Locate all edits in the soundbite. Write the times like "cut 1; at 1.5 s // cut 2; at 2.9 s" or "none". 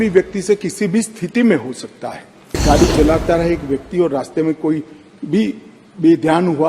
cut 1; at 2.6 s